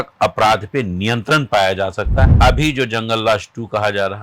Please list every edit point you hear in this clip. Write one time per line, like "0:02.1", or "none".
0:02.3